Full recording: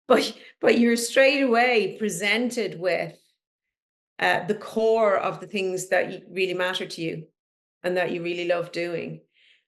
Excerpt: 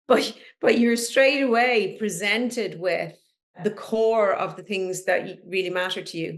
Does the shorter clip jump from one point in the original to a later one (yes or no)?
yes